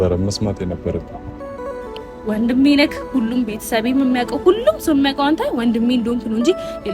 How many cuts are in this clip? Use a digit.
1